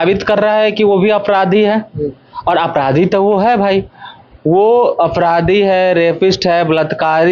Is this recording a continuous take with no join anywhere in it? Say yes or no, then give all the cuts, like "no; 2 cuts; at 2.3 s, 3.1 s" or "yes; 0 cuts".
yes; 0 cuts